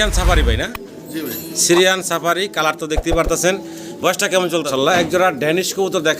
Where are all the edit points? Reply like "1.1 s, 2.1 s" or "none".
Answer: 4.7 s